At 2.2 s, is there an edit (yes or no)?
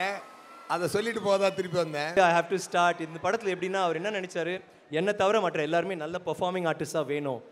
yes